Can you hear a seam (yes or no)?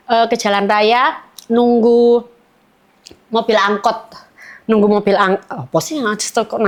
no